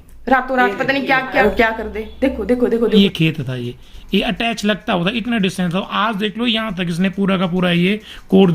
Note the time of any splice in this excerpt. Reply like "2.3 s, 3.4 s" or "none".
1.4 s, 2.8 s

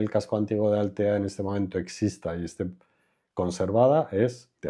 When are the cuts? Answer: none

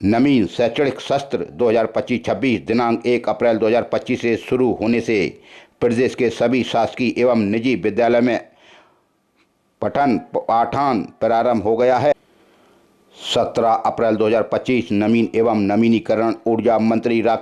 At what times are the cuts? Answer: 12.1 s

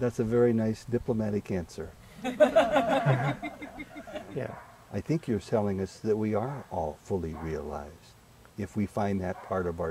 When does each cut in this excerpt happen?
4.5 s

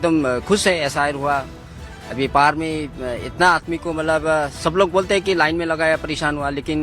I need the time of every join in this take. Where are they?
none

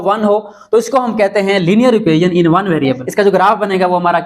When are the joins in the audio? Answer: 3.0 s

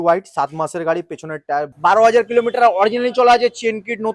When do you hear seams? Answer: 1.7 s

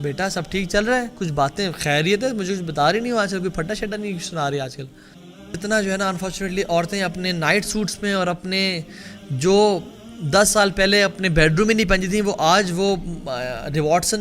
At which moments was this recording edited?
5.6 s

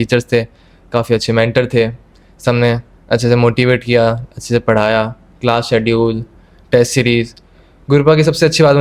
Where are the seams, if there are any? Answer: none

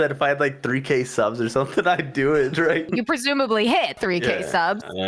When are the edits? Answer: 2.9 s, 3.9 s

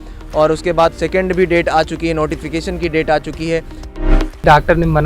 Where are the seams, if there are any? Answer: 4.1 s

